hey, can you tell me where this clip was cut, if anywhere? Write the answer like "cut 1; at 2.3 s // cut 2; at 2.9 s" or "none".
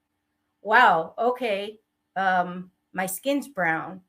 none